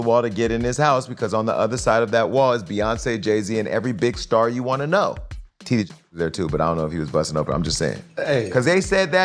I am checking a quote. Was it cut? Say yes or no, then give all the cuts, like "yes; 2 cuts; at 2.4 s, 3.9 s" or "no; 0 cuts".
no; 0 cuts